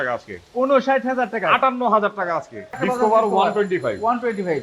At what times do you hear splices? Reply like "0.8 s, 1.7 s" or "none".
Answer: 2.8 s